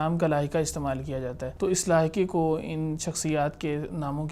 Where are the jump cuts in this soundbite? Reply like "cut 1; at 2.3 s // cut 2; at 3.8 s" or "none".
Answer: cut 1; at 1.4 s